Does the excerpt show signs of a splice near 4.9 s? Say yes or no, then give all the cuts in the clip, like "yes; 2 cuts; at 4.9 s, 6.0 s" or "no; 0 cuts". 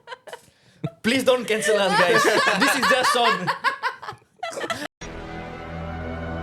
yes; 1 cut; at 4.9 s